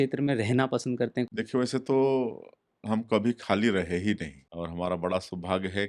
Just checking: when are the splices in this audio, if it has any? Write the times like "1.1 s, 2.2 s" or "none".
1.3 s, 4.4 s